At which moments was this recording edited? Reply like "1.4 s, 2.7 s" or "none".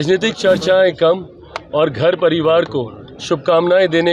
none